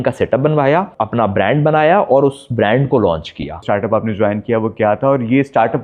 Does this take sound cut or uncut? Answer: cut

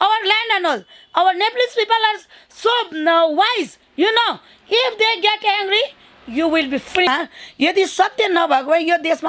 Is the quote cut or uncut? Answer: cut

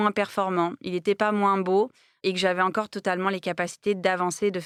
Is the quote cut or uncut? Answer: uncut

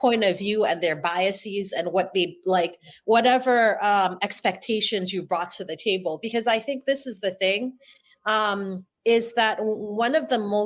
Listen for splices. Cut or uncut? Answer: cut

